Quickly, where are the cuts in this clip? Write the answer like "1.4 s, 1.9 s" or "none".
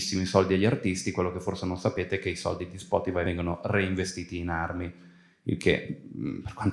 3.2 s